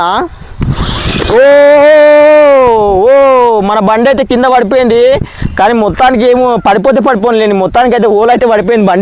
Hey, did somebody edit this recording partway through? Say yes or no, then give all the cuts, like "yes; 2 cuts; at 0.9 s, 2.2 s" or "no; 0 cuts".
no; 0 cuts